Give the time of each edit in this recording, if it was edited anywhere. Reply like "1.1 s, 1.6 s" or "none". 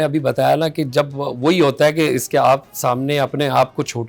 none